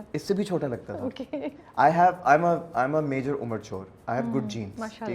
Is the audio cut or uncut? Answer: uncut